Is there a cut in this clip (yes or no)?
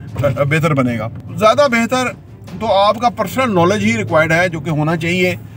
yes